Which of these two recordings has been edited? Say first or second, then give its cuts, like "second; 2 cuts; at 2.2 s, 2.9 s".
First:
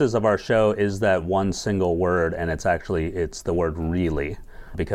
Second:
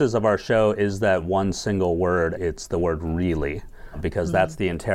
second; 1 cut; at 2.4 s